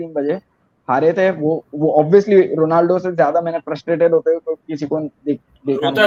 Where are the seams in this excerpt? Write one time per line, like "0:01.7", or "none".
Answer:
none